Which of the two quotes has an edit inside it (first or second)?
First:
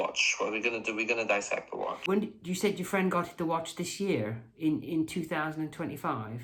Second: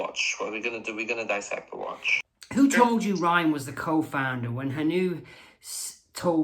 second